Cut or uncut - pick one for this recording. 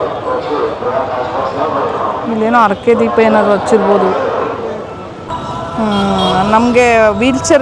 cut